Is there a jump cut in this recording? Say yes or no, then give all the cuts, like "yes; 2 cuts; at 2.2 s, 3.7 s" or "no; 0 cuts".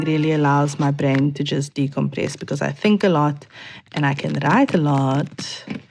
no; 0 cuts